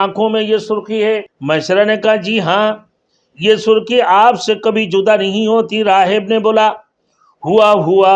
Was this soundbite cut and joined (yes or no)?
yes